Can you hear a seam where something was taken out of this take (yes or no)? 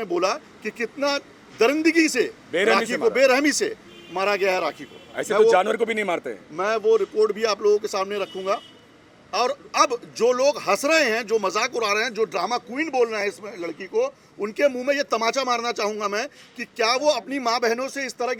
no